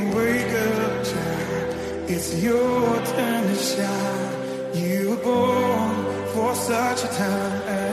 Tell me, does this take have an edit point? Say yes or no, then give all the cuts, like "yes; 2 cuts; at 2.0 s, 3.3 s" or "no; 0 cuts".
no; 0 cuts